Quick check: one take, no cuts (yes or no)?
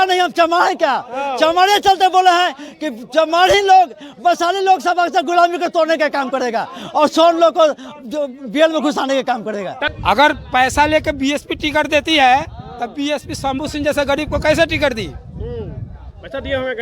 no